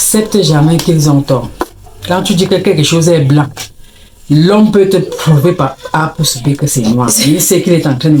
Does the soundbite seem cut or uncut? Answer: uncut